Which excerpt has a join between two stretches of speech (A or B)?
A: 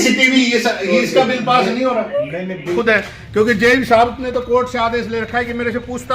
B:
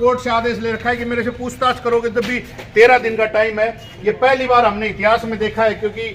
A